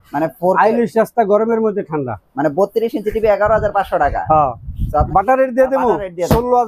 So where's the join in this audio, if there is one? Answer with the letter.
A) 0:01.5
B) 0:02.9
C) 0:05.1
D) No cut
C